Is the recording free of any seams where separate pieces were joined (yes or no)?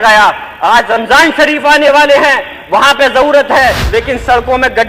no